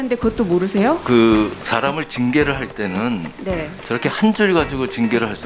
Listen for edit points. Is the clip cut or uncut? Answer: uncut